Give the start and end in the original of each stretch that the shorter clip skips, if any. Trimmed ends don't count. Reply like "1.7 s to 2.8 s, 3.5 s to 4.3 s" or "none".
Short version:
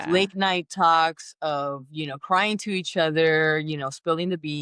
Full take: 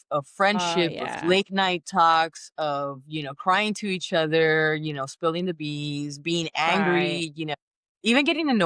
none